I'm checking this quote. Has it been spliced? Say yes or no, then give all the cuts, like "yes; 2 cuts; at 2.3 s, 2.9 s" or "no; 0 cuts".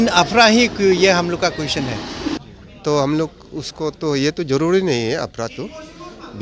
yes; 1 cut; at 2.4 s